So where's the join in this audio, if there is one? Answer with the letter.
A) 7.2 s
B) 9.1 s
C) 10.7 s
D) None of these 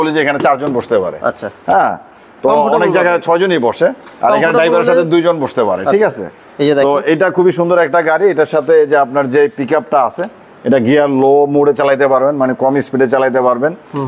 D